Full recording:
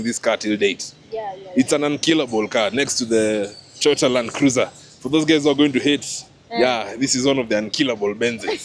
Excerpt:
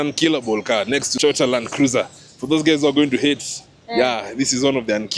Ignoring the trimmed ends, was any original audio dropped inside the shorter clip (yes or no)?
yes